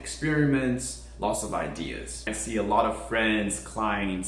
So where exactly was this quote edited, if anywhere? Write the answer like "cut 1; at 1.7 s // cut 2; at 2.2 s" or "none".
cut 1; at 2.3 s